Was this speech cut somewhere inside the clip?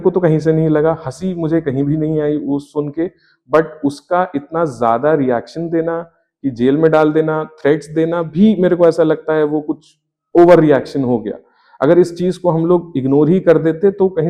no; 0 cuts

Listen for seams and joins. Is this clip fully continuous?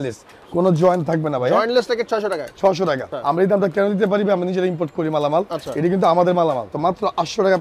no; 2 cuts; at 3.1 s, 6.7 s

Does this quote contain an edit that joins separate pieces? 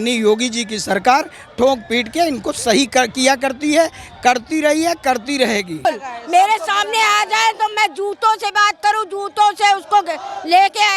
yes; 1 cut; at 5.9 s

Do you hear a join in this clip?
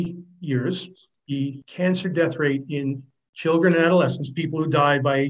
yes; 1 cut; at 1.3 s

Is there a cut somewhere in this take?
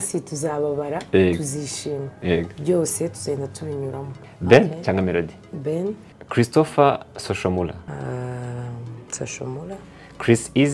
yes; 3 cuts; at 4.1 s, 6.1 s, 7.8 s

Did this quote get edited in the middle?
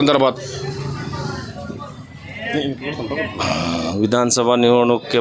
no; 0 cuts

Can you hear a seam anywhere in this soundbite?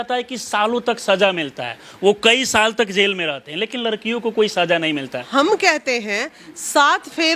yes; 1 cut; at 5.3 s

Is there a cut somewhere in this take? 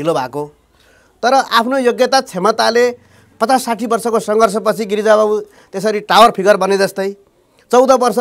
no; 0 cuts

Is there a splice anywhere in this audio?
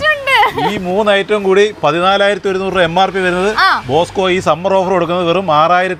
no; 0 cuts

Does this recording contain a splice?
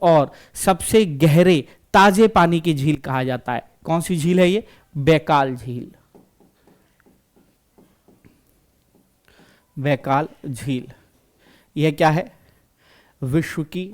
no; 0 cuts

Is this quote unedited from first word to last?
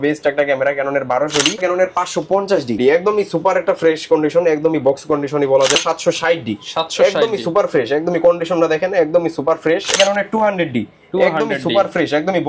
no; 4 cuts; at 1.6 s, 2.8 s, 5.8 s, 9.9 s

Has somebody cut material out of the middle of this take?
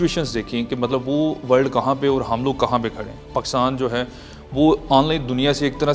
no; 0 cuts

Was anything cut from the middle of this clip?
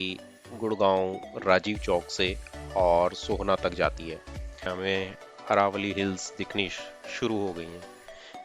yes; 1 cut; at 4.6 s

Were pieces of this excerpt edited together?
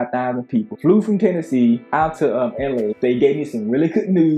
yes; 1 cut; at 2.9 s

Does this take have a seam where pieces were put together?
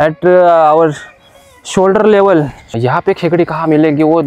yes; 1 cut; at 2.6 s

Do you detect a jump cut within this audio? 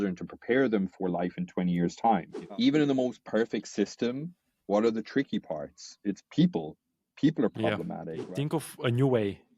yes; 2 cuts; at 2.4 s, 8.2 s

